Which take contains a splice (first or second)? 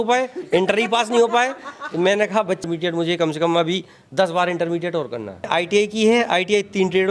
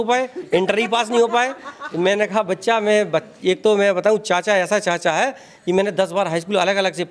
first